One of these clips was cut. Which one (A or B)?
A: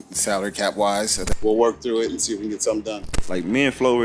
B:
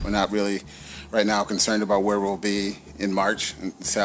A